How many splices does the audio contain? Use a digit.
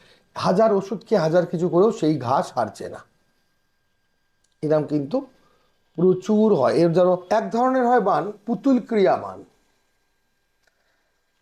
1